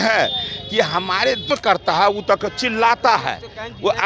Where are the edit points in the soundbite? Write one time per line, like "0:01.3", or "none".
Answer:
0:01.5